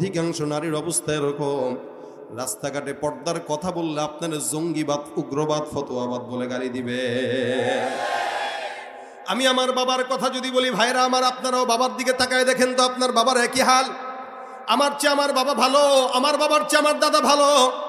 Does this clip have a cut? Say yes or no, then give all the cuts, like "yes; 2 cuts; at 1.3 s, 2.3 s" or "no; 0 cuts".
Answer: no; 0 cuts